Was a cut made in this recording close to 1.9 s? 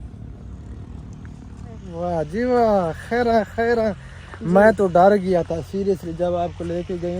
yes; 1 cut; at 1.9 s

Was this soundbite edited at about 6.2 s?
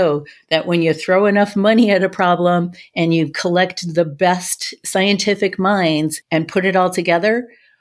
yes; 1 cut; at 6.2 s

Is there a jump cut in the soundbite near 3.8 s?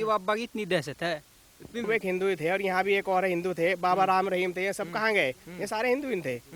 no; 1 cut; at 1.8 s

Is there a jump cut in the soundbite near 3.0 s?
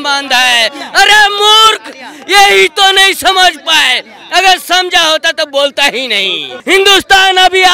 no; 1 cut; at 6.5 s

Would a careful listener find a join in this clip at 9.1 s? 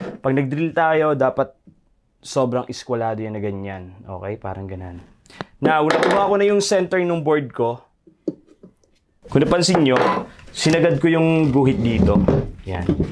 yes; 1 cut; at 9.1 s

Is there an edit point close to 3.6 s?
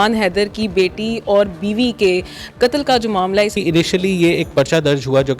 yes; 1 cut; at 3.6 s

